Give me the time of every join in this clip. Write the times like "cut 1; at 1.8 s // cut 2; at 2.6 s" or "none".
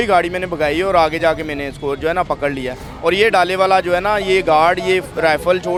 none

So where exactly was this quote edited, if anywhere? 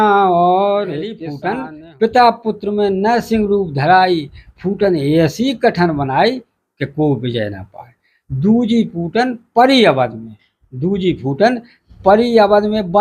cut 1; at 1.3 s

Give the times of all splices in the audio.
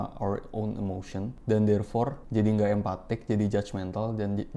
cut 1; at 1.3 s // cut 2; at 2.2 s

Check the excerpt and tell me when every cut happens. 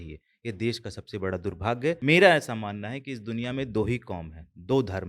cut 1; at 2.0 s

